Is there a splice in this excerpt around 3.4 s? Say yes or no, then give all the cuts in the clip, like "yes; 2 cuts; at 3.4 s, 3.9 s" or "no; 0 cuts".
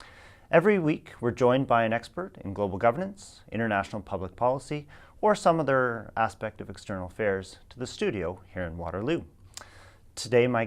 yes; 1 cut; at 3.4 s